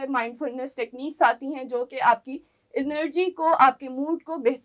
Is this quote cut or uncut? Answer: uncut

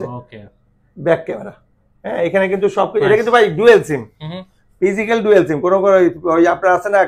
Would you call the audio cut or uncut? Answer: uncut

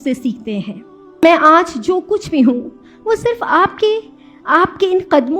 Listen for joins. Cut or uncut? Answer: cut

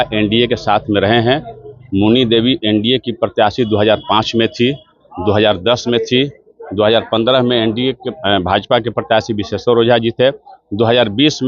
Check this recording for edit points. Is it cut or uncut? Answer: uncut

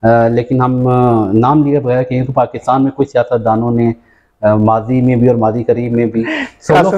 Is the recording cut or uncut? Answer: uncut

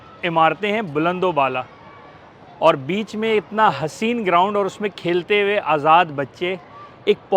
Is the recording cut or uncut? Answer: uncut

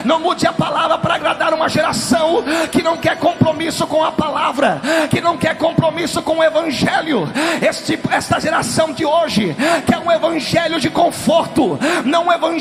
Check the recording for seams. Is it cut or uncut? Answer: uncut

